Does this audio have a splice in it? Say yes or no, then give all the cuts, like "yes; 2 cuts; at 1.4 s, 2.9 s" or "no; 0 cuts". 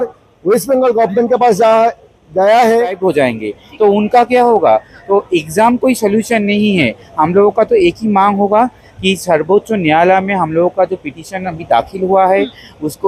yes; 1 cut; at 3.0 s